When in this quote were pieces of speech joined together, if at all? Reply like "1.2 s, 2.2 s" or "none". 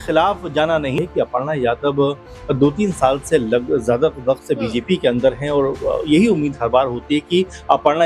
1.0 s